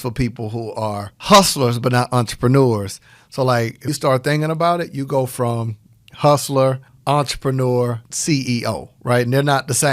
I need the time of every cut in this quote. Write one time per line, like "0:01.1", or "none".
0:01.1
0:03.9
0:06.9
0:08.1